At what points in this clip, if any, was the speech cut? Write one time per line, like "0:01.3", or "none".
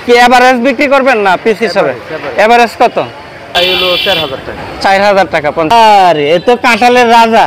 0:03.5
0:05.7